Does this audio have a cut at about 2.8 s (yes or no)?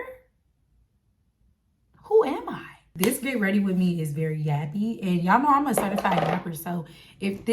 yes